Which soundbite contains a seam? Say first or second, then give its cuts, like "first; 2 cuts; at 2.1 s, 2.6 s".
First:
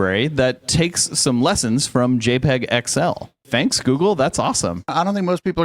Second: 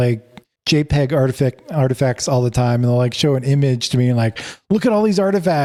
first; 2 cuts; at 3.5 s, 4.9 s